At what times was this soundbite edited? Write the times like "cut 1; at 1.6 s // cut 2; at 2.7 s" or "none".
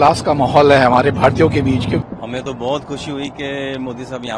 cut 1; at 2.0 s